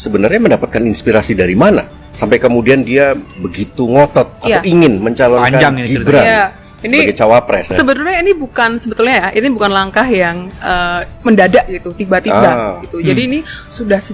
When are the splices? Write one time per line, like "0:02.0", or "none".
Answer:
0:04.4
0:07.7